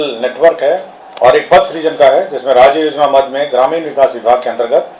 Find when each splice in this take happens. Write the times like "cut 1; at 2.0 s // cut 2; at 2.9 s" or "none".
cut 1; at 1.0 s